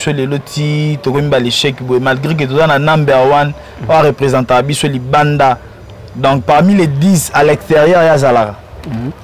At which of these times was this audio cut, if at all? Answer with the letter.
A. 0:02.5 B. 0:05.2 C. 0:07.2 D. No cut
D